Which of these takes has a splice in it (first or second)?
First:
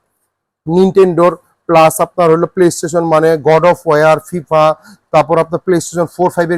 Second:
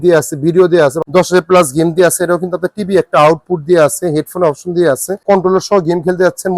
second